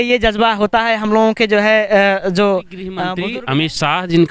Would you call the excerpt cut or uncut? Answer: cut